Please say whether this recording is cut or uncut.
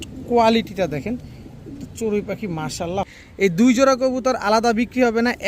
cut